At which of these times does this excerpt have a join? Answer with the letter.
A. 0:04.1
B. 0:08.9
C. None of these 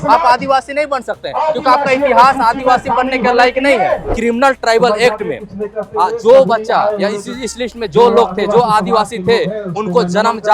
A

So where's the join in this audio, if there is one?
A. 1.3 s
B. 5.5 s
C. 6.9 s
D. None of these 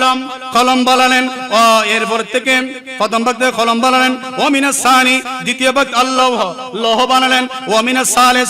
D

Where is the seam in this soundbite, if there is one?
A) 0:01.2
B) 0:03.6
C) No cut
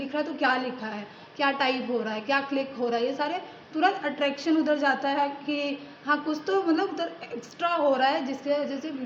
C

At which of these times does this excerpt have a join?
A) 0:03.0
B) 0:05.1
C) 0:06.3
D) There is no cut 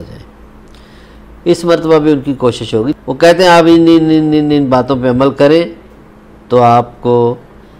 A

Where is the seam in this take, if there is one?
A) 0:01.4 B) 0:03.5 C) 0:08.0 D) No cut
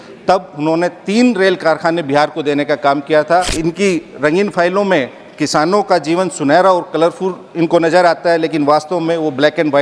B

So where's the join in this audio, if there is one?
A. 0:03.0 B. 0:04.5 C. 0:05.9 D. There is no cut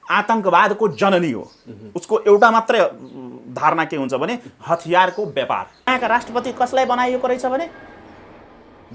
C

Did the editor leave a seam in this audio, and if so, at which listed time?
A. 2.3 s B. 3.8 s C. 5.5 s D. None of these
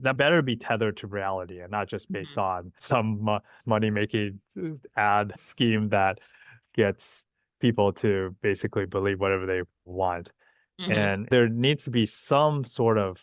C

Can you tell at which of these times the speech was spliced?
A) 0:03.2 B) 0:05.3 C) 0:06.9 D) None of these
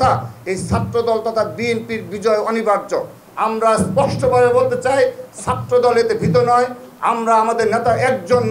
A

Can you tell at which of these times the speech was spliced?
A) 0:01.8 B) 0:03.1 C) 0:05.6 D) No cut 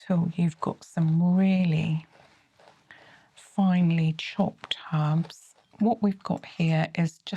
C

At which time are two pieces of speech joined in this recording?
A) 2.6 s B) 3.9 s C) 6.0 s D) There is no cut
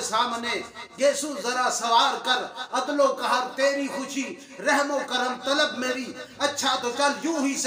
D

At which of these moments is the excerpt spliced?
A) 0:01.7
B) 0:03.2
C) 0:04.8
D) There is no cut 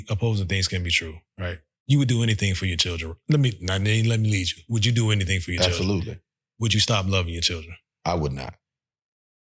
A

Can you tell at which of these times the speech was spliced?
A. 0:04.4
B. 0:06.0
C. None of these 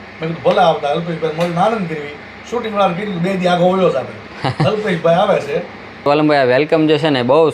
C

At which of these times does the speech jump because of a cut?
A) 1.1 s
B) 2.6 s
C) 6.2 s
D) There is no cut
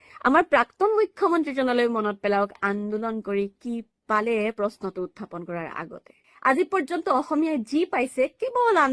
C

